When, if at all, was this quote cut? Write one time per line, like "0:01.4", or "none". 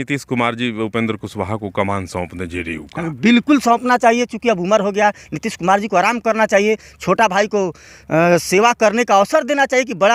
none